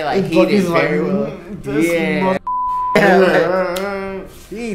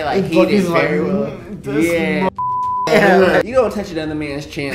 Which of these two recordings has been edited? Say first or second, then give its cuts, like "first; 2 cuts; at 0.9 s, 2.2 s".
second; 1 cut; at 3.4 s